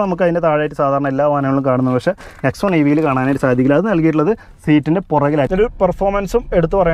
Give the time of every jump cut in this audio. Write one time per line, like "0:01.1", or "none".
0:05.5